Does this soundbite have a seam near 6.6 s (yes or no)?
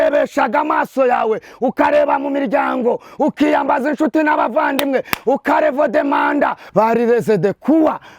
yes